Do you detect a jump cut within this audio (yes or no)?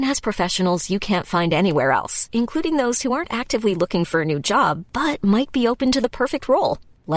no